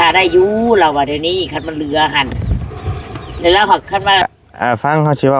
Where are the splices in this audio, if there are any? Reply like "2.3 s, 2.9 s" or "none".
4.4 s